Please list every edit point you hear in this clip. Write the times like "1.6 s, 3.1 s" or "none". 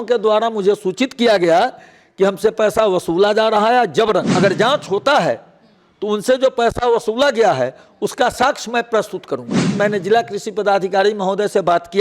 4.3 s, 9.7 s